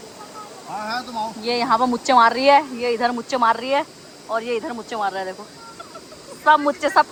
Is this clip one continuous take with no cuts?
yes; 0 cuts

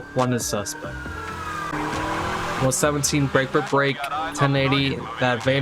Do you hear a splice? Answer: yes; 1 cut; at 1.7 s

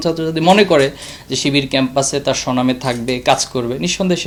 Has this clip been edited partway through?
no; 0 cuts

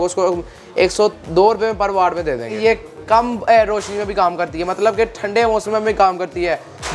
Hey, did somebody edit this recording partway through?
yes; 1 cut; at 2.5 s

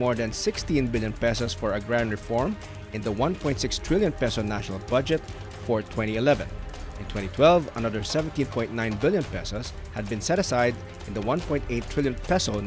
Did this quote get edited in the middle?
yes; 1 cut; at 1.1 s

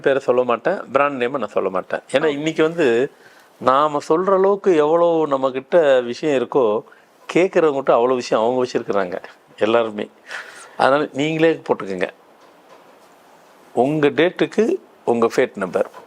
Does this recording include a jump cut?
no; 0 cuts

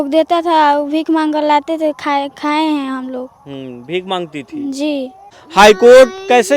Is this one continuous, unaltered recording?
no; 1 cut; at 5.4 s

